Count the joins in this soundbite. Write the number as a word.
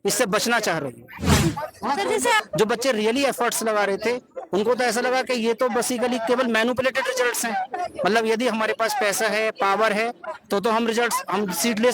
one